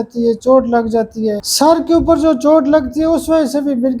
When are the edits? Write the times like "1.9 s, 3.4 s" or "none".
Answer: 1.5 s